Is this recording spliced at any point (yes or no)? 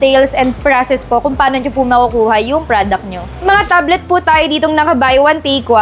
yes